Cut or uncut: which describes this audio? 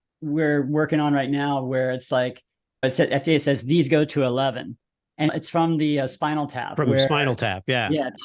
cut